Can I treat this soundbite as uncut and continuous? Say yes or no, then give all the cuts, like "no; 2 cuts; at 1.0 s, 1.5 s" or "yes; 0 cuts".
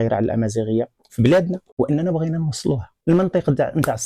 no; 2 cuts; at 1.7 s, 2.9 s